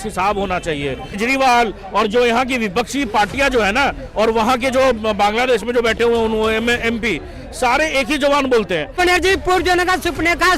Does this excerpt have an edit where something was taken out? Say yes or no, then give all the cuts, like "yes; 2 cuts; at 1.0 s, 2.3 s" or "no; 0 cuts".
yes; 2 cuts; at 1.2 s, 9.0 s